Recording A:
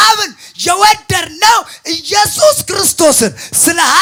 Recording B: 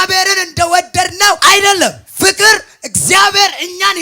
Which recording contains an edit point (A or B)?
B